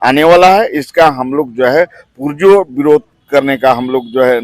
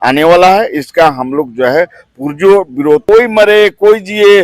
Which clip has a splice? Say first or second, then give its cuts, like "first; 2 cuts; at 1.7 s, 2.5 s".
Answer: second; 1 cut; at 3.0 s